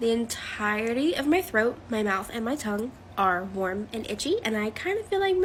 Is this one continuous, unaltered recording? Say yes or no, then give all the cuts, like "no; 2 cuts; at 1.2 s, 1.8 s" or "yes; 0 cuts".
yes; 0 cuts